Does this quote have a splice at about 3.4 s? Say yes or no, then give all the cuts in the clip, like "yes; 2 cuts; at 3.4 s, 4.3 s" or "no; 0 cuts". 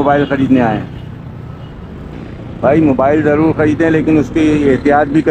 no; 1 cut; at 2.1 s